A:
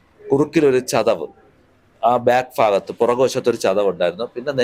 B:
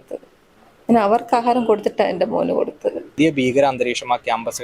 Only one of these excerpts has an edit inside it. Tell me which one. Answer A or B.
B